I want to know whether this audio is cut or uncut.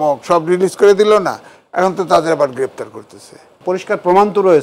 cut